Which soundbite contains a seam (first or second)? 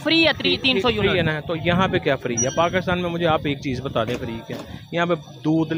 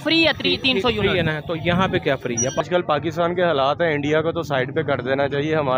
second